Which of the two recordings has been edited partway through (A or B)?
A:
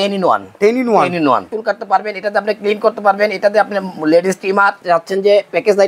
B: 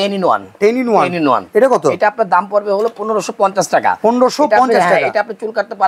A